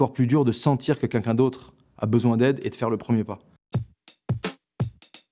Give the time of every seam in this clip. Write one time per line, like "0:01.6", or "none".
0:03.5